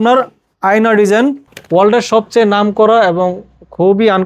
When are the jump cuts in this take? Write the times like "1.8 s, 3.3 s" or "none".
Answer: 1.4 s